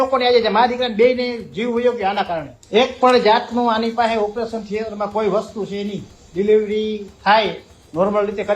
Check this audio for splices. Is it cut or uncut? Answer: cut